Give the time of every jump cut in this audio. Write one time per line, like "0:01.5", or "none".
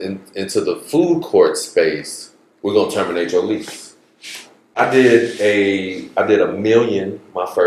0:04.7